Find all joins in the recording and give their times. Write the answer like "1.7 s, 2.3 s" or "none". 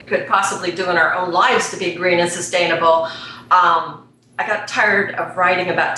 1.9 s

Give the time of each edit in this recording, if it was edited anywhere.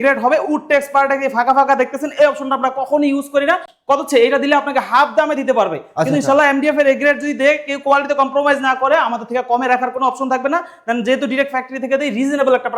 none

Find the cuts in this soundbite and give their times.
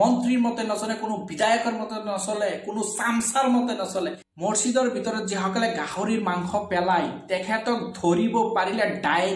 4.3 s

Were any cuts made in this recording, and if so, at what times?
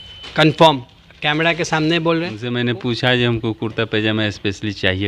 2.5 s

